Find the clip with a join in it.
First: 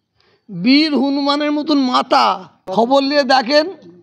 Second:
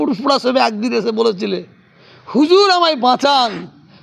first; 1 cut; at 2.5 s

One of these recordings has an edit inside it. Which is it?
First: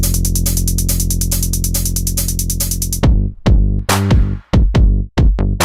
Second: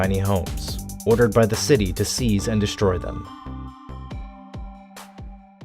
second; 1 cut; at 1.6 s

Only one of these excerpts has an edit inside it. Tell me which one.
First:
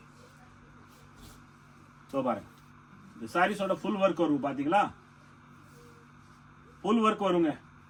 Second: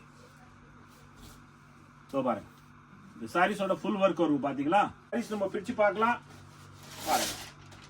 second; 1 cut; at 5.1 s

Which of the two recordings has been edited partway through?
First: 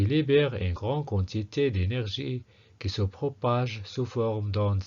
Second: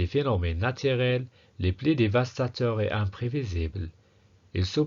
first; 1 cut; at 3.5 s

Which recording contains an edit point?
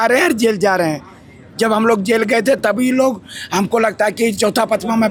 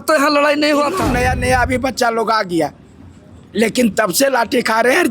second; 1 cut; at 1.1 s

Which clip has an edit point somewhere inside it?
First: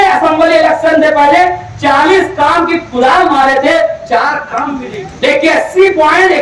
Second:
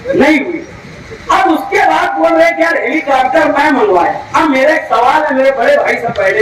first; 1 cut; at 4.6 s

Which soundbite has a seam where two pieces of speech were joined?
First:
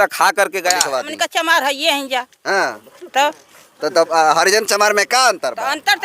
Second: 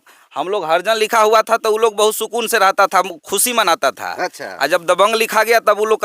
first; 1 cut; at 0.9 s

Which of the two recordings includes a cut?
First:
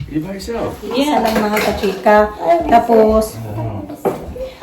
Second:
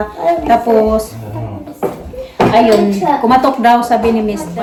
first; 1 cut; at 1.1 s

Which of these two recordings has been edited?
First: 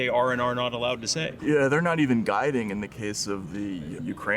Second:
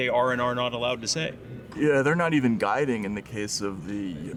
first; 1 cut; at 1.3 s

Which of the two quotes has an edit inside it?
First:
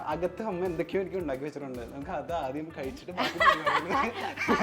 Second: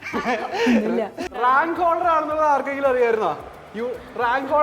second; 1 cut; at 1.2 s

